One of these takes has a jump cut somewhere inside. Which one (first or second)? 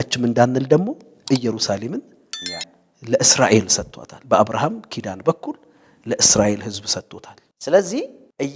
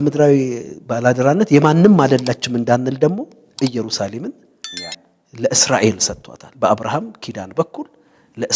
first